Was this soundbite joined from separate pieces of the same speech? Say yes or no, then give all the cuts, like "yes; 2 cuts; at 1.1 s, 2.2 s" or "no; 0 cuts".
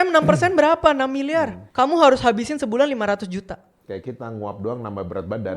yes; 1 cut; at 1.6 s